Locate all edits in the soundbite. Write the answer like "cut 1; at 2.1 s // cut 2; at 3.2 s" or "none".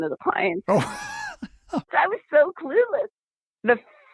cut 1; at 1.9 s // cut 2; at 3.2 s